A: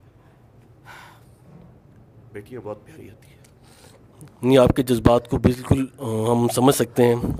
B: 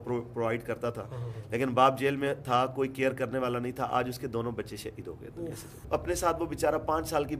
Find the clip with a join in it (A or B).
B